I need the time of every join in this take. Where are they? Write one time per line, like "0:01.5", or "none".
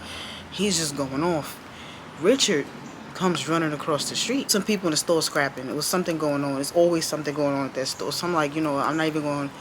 0:04.5